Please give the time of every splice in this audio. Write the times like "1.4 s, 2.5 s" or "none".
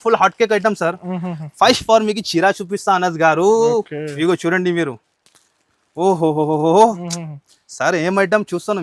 none